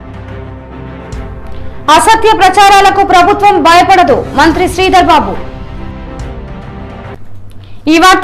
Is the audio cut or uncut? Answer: uncut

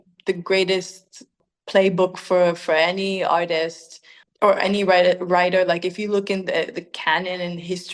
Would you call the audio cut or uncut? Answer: cut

